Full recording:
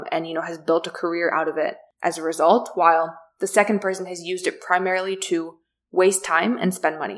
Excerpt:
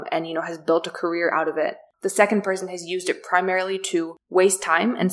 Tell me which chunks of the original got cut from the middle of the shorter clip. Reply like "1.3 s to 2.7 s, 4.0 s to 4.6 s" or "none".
1.9 s to 3.2 s, 5.6 s to 5.8 s